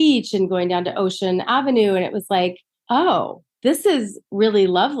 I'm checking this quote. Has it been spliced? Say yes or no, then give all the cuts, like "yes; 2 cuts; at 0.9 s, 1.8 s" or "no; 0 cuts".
no; 0 cuts